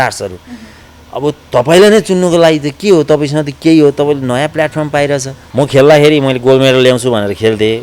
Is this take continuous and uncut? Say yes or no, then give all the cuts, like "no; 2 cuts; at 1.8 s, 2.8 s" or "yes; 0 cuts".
no; 1 cut; at 5.4 s